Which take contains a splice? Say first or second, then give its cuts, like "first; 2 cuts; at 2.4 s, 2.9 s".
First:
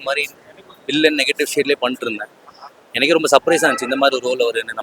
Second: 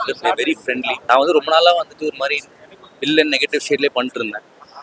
second; 1 cut; at 0.9 s